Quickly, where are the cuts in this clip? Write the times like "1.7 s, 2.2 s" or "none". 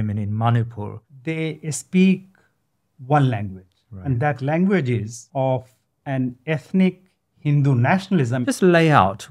1.0 s, 5.2 s, 8.4 s